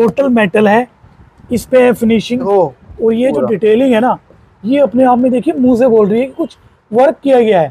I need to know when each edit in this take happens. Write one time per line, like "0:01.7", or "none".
0:02.5